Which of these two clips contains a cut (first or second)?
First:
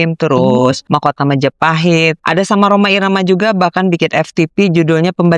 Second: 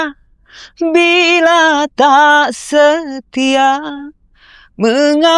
first